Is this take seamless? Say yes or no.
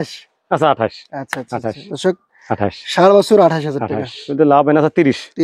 no